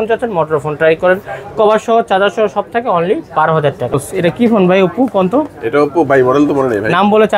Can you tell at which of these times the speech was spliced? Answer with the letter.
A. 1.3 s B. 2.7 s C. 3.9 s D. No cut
C